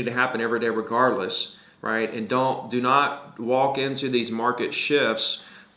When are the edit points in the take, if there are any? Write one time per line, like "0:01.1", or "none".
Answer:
none

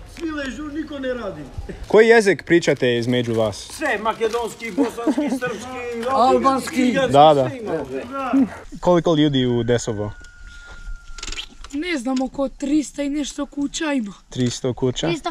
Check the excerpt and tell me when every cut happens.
0:01.8
0:08.7

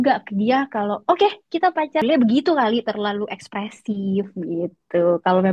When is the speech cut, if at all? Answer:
0:02.0

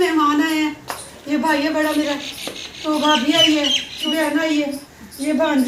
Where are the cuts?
0:04.0

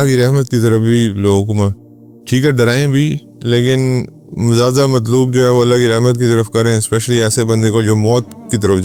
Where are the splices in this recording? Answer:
none

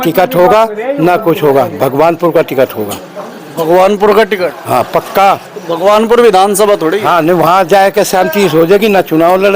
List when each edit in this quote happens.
none

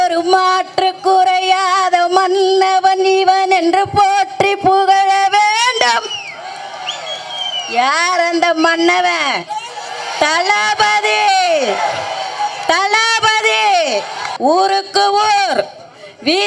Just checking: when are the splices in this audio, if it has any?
0:14.2

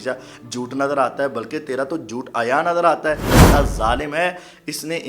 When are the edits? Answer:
0:03.3

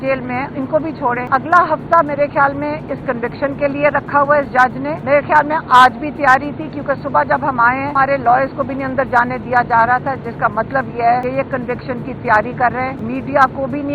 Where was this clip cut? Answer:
0:01.2
0:04.9
0:07.9
0:11.2
0:13.0

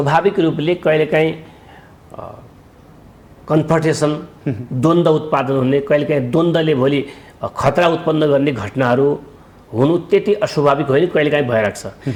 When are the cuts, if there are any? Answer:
none

